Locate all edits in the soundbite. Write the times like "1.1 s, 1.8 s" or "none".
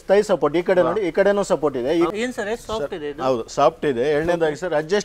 2.1 s